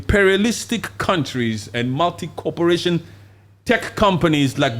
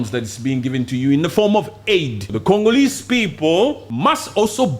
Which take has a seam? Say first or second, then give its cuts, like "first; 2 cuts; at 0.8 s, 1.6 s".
second; 2 cuts; at 2.2 s, 3.9 s